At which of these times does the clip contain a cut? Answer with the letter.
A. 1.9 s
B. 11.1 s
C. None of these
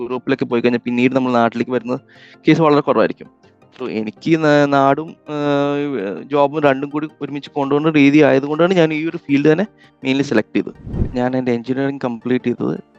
B